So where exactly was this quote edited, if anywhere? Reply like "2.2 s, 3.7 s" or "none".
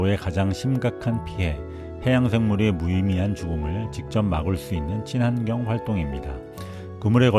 none

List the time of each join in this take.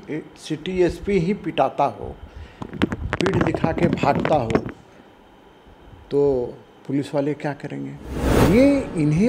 8.4 s

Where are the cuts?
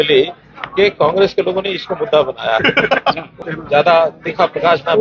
3.3 s

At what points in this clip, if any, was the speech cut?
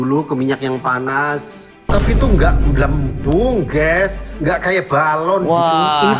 none

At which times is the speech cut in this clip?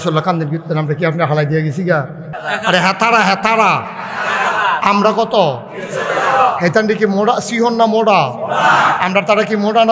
2.3 s

